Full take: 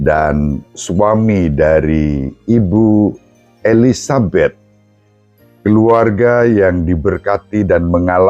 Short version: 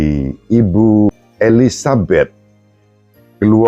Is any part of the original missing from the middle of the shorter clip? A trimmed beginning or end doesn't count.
yes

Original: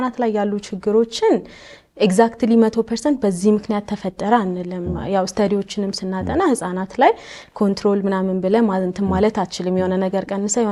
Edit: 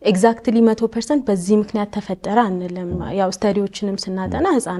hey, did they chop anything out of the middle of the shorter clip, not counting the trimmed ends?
no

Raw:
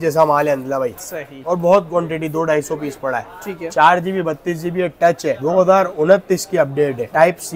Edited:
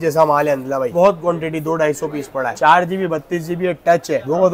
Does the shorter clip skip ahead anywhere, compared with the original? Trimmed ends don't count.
yes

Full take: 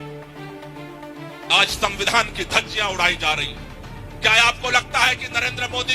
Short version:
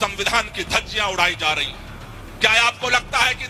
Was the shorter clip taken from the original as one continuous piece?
yes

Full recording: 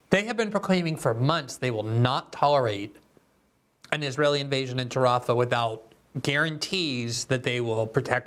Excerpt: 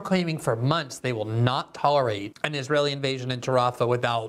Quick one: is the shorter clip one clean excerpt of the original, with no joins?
no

